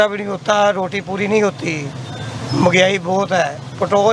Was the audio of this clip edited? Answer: no; 0 cuts

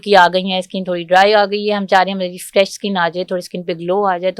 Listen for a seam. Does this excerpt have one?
no; 0 cuts

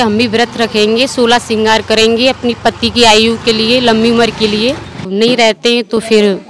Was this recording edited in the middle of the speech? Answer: yes; 1 cut; at 5.1 s

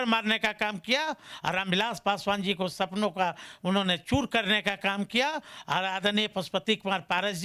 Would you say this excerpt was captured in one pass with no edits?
yes; 0 cuts

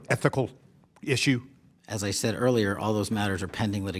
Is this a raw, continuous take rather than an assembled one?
yes; 0 cuts

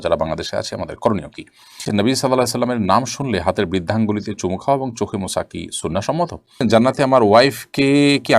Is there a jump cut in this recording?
yes; 2 cuts; at 1.9 s, 6.6 s

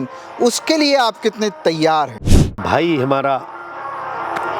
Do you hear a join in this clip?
yes; 1 cut; at 2.6 s

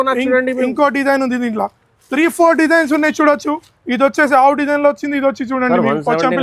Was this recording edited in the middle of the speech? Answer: no; 0 cuts

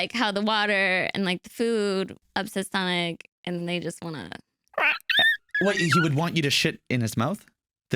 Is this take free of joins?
no; 2 cuts; at 2.2 s, 5.4 s

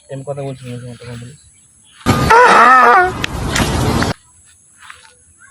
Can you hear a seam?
no; 0 cuts

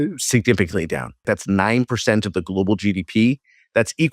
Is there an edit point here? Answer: yes; 1 cut; at 1.2 s

